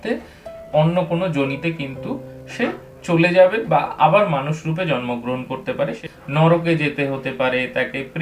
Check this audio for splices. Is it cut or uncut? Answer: cut